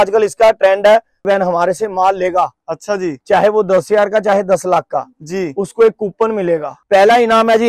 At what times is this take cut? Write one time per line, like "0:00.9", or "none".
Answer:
0:01.3
0:06.7